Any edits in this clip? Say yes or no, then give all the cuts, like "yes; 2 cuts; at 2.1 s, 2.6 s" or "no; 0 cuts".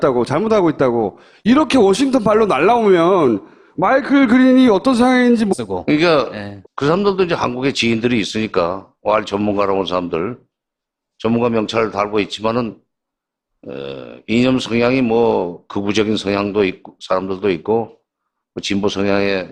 no; 0 cuts